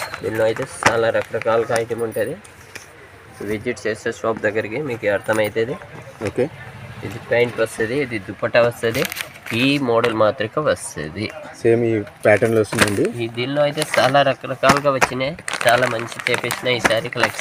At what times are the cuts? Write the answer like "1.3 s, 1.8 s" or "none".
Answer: none